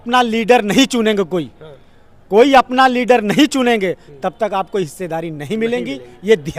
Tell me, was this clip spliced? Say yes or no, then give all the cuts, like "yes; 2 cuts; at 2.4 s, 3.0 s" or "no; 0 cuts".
no; 0 cuts